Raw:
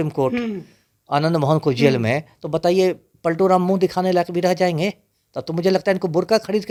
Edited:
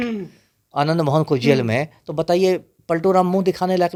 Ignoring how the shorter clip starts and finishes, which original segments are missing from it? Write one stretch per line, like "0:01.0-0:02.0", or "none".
none